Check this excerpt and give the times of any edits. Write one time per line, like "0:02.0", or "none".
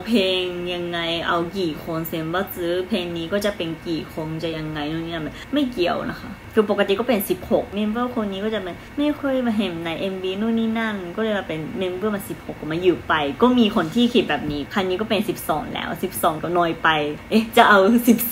0:05.4
0:06.4
0:07.7
0:09.0
0:14.6
0:16.8